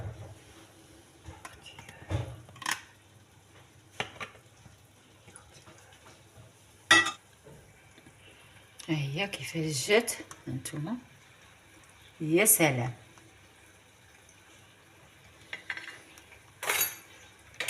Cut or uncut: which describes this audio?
cut